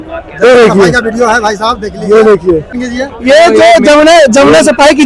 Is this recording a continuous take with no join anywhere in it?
yes; 0 cuts

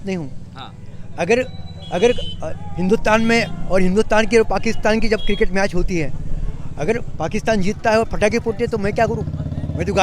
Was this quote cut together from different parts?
no; 0 cuts

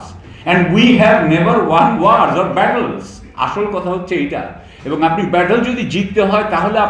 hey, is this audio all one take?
yes; 0 cuts

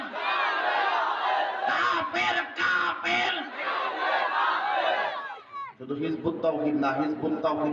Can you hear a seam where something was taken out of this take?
no; 0 cuts

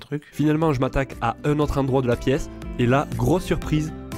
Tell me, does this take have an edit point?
no; 0 cuts

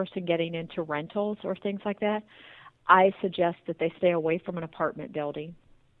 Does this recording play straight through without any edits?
yes; 0 cuts

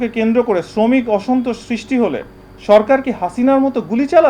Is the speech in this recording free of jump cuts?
yes; 0 cuts

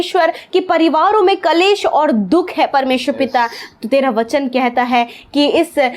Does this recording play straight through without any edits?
yes; 0 cuts

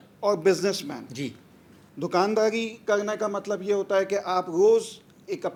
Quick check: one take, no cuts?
yes; 0 cuts

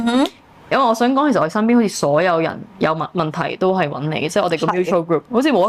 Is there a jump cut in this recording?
no; 0 cuts

